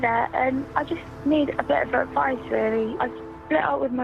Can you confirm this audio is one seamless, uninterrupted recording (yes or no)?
no